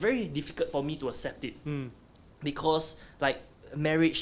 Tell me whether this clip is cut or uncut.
uncut